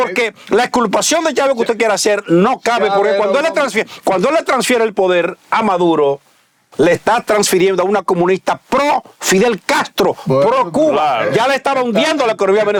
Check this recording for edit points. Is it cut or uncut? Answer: uncut